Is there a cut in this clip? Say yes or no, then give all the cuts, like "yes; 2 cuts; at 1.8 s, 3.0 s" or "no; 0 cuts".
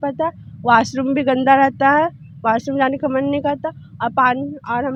no; 0 cuts